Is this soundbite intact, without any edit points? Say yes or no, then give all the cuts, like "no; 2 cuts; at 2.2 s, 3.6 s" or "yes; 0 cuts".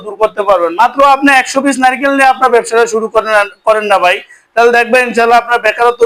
yes; 0 cuts